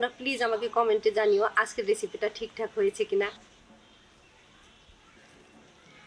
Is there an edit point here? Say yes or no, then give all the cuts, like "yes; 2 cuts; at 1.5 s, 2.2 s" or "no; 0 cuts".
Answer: yes; 2 cuts; at 3.3 s, 5.1 s